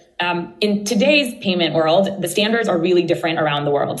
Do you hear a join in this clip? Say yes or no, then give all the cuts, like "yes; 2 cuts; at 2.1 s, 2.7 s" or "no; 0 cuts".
no; 0 cuts